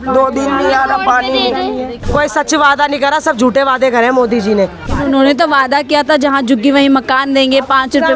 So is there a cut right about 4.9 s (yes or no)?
yes